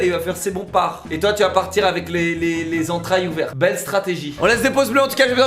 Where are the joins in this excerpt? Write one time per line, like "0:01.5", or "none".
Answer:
none